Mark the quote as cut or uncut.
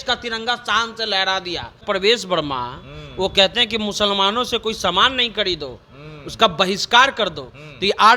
cut